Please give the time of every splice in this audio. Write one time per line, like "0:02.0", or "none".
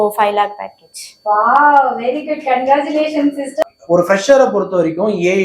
0:03.6